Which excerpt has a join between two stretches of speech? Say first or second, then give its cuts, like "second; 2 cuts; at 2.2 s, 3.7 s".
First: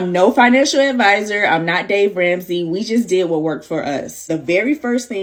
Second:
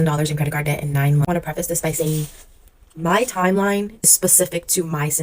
second; 1 cut; at 1.2 s